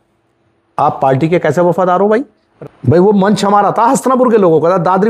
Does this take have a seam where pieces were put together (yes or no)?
yes